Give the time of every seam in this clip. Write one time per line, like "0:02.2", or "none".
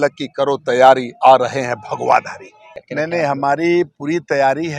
0:02.7